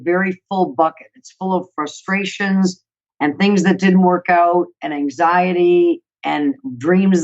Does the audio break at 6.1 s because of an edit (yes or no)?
no